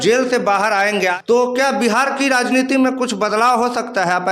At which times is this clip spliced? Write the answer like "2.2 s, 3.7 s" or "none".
1.2 s